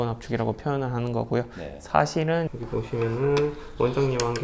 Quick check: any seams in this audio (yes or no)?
yes